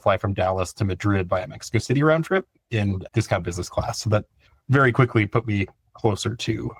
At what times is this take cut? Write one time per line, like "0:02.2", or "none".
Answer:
none